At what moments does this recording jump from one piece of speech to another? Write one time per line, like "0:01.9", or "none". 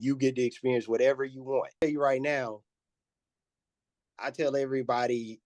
0:01.8